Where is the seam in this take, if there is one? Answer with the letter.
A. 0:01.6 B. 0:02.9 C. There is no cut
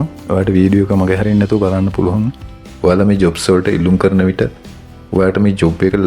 B